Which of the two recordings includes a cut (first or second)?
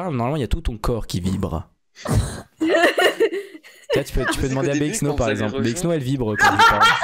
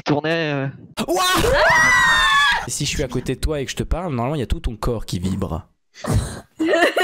second